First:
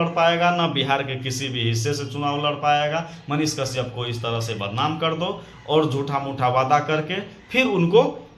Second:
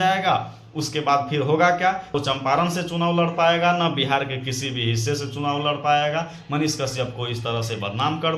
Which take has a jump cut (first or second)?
second